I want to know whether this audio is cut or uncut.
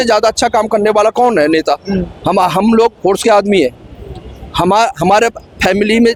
uncut